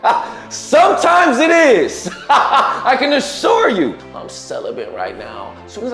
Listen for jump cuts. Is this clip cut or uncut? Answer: cut